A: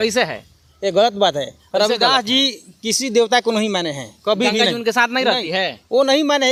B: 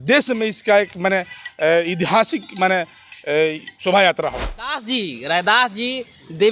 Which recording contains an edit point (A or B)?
B